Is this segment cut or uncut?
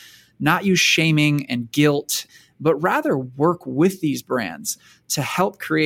cut